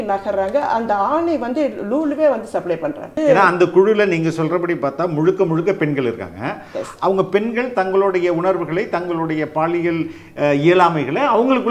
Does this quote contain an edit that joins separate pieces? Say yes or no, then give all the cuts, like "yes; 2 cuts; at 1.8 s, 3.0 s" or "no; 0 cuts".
yes; 1 cut; at 3.1 s